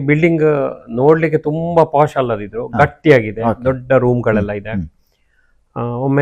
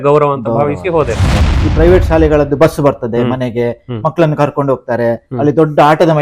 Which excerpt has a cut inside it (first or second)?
second